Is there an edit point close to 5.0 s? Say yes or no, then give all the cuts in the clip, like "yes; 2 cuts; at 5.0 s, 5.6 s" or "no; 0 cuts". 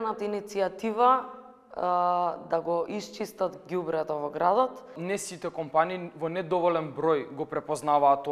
yes; 1 cut; at 5.0 s